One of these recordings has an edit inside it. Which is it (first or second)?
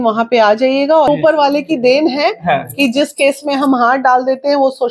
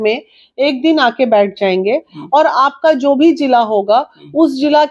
first